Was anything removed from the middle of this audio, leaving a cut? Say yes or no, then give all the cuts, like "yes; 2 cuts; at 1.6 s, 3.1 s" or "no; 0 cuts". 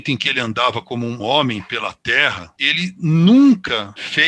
no; 0 cuts